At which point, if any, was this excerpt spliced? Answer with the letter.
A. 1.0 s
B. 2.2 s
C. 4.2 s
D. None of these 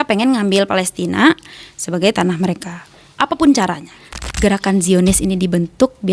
C